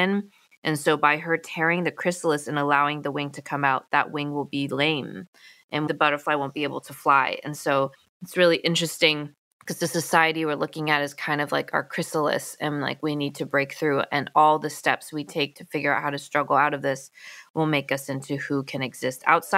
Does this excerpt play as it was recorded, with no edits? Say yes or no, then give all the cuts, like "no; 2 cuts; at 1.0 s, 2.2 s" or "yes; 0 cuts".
yes; 0 cuts